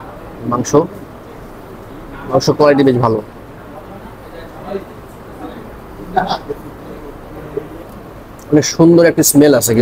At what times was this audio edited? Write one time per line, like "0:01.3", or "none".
0:07.8